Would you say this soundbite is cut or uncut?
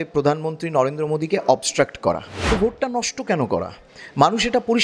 cut